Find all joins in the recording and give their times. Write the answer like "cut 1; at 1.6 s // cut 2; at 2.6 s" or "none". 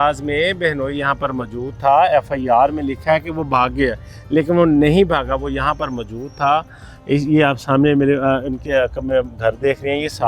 none